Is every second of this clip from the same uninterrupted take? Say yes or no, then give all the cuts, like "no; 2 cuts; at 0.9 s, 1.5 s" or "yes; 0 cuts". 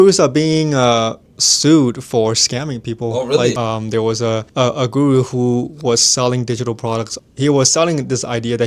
no; 3 cuts; at 3.6 s, 4.5 s, 7.2 s